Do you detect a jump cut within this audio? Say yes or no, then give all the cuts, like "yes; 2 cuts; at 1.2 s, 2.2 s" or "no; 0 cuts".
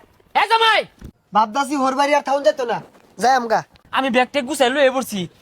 yes; 2 cuts; at 1.0 s, 3.8 s